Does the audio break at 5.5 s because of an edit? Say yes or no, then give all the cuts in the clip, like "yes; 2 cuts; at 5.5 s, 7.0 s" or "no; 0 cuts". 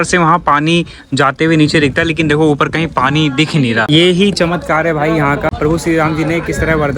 yes; 2 cuts; at 3.9 s, 5.5 s